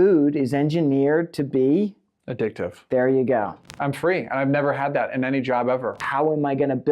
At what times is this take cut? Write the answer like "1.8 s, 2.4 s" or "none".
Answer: 3.7 s, 6.0 s